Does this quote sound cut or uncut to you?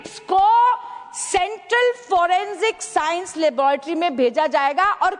uncut